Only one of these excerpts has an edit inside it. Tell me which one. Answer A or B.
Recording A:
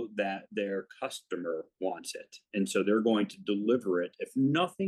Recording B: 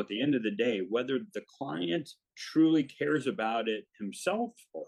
B